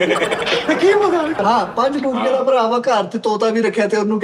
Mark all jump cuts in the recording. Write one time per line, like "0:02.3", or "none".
0:01.4